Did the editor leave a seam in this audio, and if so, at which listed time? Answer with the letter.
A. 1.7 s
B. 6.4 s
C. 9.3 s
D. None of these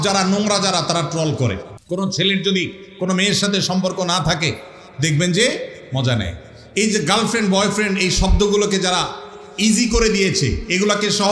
A